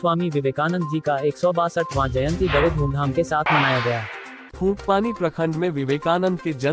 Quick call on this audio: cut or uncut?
cut